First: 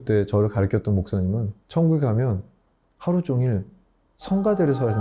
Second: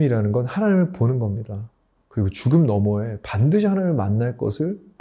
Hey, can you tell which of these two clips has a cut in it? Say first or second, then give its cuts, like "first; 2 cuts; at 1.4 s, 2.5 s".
first; 1 cut; at 1.6 s